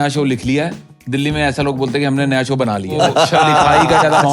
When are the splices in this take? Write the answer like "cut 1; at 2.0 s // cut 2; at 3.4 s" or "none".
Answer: cut 1; at 2.9 s